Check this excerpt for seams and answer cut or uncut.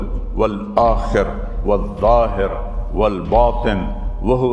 uncut